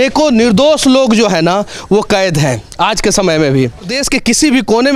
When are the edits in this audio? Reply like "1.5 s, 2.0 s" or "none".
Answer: 4.0 s